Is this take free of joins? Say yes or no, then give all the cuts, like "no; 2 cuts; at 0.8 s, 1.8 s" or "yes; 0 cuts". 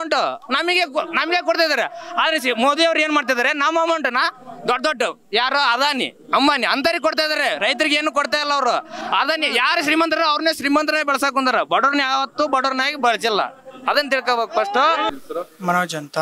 yes; 0 cuts